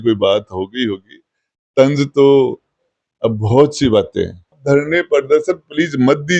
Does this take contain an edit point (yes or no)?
yes